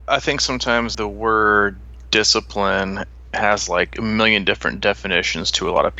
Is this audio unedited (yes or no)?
no